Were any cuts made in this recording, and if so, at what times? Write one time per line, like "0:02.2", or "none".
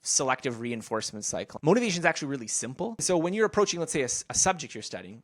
0:01.4
0:03.0